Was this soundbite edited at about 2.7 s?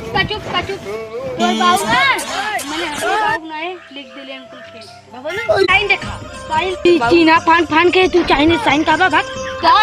no; 1 cut; at 5.7 s

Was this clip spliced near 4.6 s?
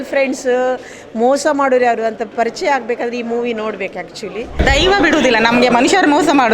yes; 1 cut; at 4.6 s

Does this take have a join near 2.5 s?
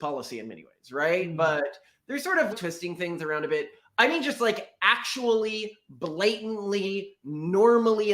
yes; 1 cut; at 2.5 s

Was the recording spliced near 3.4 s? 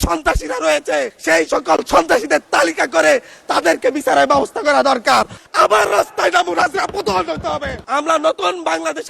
no; 3 cuts; at 1.2 s, 5.4 s, 7.8 s

